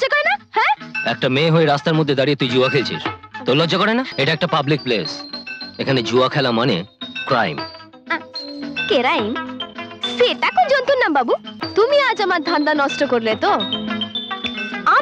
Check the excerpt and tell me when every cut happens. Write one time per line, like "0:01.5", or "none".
0:04.1
0:11.6

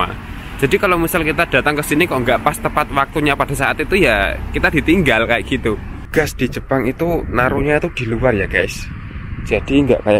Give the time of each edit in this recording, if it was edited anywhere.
0:05.9

